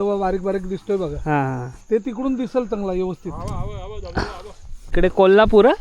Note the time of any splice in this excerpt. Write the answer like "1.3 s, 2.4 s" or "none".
4.9 s

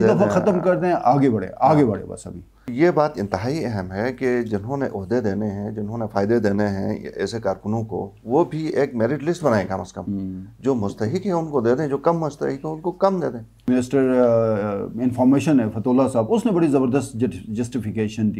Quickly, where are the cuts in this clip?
2.6 s, 13.6 s

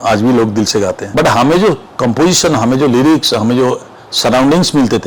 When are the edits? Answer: 1.0 s

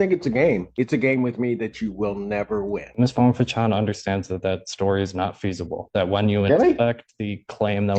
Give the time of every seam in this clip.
2.9 s

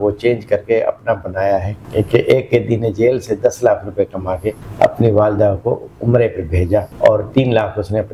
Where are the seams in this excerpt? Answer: 1.8 s, 4.6 s, 6.9 s

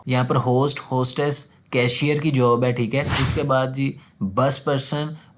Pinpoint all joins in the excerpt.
3.2 s

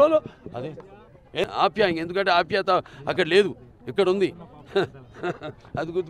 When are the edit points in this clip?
1.4 s

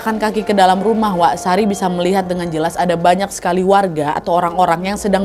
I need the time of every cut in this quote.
none

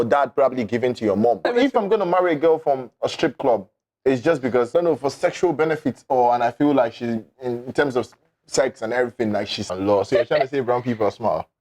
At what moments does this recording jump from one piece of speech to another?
1.5 s, 4.7 s, 9.7 s

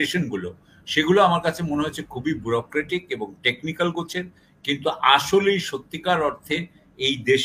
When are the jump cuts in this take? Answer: none

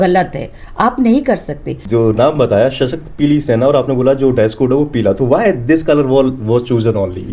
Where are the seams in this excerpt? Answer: 1.7 s

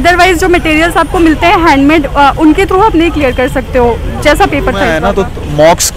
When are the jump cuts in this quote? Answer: 4.9 s

